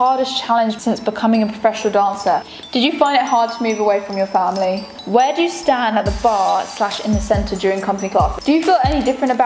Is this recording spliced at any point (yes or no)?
yes